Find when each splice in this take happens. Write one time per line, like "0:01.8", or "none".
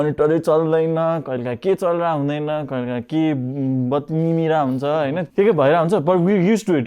0:05.2